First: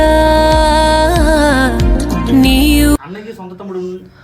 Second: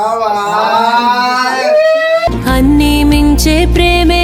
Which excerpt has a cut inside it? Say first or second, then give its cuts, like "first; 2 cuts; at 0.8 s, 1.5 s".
first; 1 cut; at 3.0 s